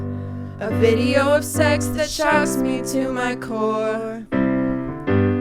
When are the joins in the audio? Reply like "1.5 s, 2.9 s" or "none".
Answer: 4.2 s